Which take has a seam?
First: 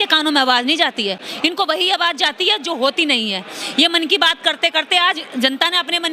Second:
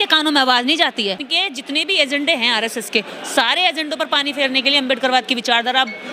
second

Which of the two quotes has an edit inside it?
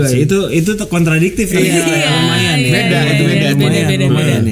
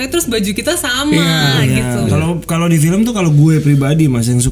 second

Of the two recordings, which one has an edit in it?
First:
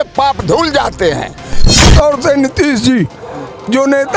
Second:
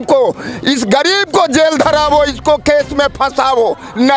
first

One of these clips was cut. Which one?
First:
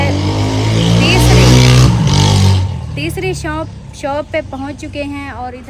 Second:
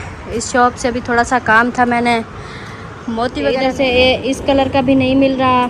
second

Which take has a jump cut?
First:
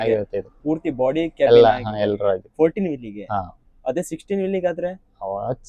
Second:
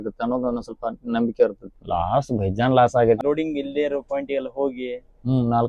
second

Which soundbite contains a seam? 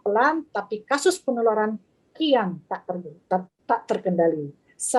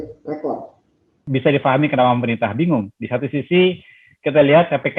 second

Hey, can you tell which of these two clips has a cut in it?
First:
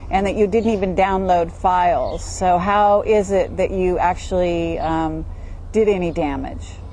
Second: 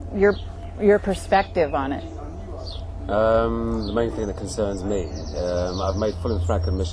second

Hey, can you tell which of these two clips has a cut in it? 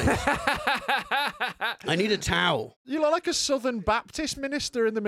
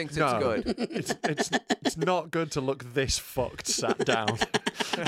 first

